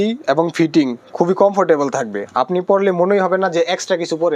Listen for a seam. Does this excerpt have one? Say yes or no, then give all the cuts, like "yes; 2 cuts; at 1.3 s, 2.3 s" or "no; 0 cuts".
no; 0 cuts